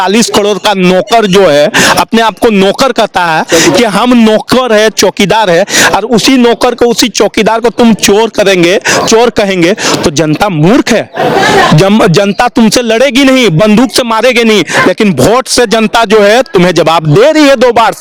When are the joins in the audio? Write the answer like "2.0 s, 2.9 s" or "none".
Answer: none